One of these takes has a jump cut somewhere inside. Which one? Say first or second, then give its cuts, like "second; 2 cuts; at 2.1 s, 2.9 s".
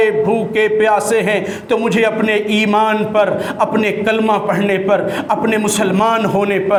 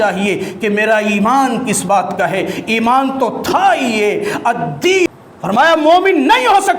second; 1 cut; at 5.1 s